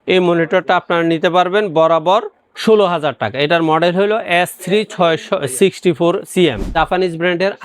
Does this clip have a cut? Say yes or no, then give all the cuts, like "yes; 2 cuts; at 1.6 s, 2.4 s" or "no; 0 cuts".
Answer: yes; 1 cut; at 6.7 s